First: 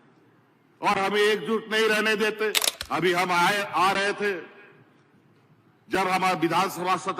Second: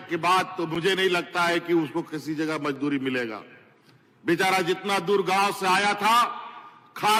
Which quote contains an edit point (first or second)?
first